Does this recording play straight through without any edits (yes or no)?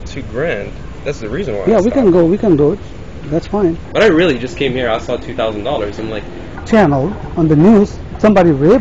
no